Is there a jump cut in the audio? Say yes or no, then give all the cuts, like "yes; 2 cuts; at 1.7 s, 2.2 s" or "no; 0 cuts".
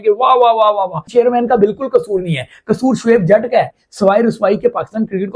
yes; 2 cuts; at 1.1 s, 3.8 s